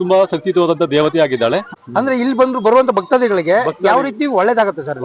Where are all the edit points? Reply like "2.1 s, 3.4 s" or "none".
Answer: 1.7 s